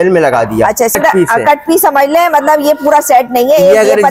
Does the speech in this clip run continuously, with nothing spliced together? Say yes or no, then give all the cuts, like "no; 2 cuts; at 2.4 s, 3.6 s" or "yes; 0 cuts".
no; 1 cut; at 1.0 s